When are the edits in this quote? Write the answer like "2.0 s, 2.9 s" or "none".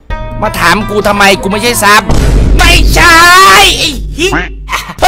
none